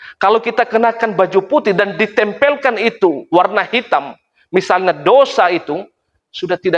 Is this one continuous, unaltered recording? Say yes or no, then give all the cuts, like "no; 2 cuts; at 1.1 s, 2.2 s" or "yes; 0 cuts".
yes; 0 cuts